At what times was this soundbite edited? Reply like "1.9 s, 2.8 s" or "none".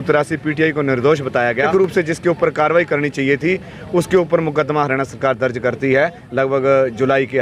1.6 s

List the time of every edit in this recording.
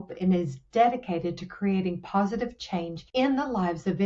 3.0 s

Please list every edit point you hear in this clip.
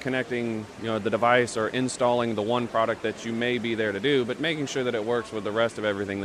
none

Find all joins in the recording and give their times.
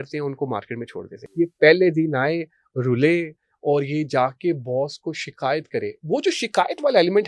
1.2 s

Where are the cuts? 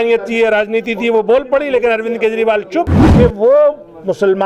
3.0 s

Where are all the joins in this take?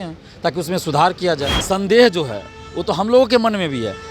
1.5 s

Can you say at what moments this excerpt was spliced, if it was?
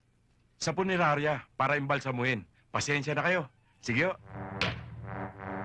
4.3 s

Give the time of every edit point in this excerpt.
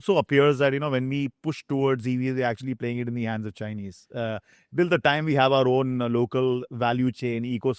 none

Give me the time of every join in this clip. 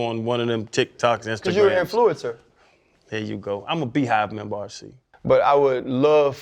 5.0 s

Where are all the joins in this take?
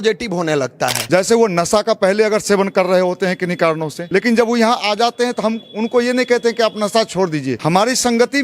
1.0 s, 3.9 s, 7.6 s

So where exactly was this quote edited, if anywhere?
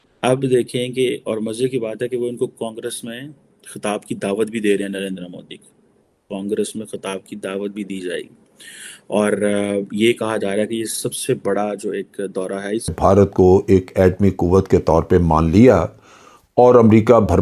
12.9 s

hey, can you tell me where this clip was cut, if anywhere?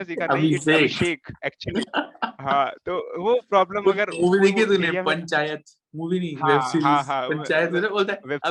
none

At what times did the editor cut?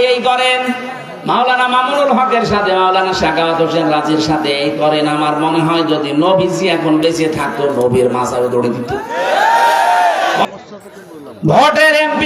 10.4 s

